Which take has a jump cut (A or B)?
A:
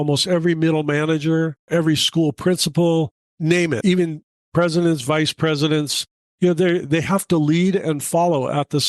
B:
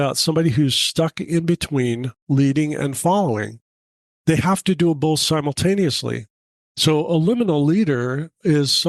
A